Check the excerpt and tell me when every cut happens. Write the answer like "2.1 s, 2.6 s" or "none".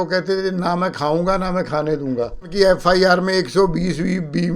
2.5 s

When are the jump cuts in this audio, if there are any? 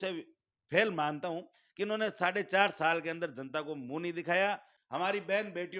4.7 s

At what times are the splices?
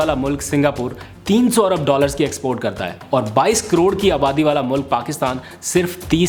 none

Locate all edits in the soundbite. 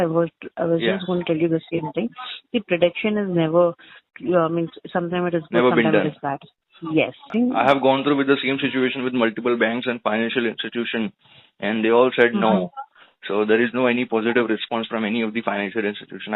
7.3 s

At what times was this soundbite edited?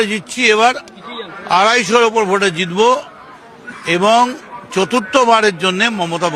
none

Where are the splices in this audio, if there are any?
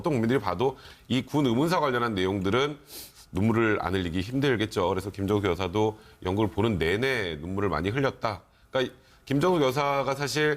6.5 s

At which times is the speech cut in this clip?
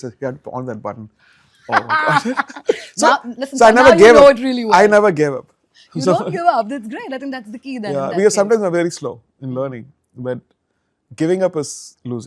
none

